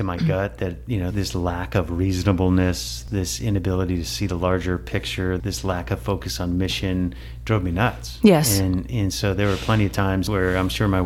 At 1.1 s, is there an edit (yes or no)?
yes